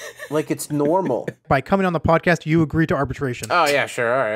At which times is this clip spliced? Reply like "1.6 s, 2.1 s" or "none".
1.4 s, 3.4 s